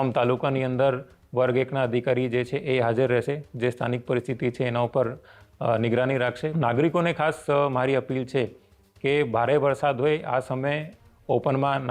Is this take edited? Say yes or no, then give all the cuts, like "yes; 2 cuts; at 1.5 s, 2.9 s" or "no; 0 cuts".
yes; 1 cut; at 6.5 s